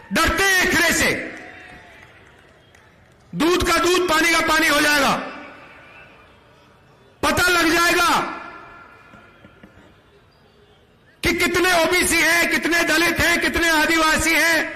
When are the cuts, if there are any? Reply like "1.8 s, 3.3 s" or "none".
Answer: none